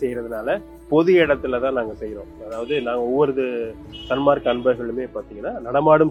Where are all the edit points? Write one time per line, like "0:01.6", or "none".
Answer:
none